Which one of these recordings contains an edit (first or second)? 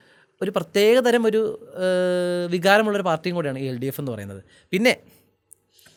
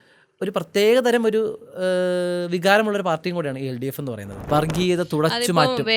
second